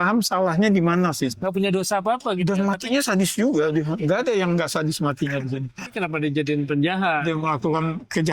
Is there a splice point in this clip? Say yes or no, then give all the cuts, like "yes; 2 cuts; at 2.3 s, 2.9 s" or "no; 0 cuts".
yes; 2 cuts; at 1.4 s, 5.8 s